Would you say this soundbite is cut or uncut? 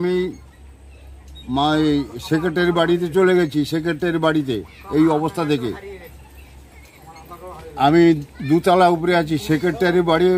uncut